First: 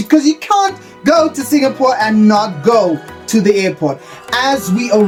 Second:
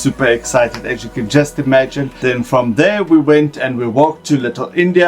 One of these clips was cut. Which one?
second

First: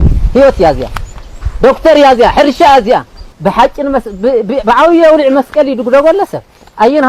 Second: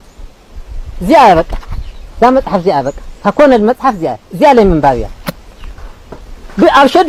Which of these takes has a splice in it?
first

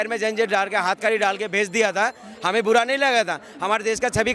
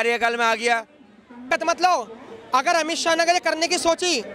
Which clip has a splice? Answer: second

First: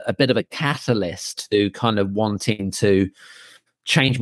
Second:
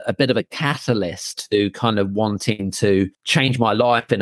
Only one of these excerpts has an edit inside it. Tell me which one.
second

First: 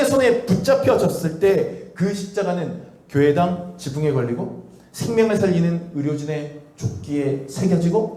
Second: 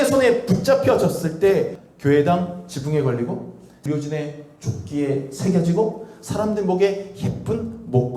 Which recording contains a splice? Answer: second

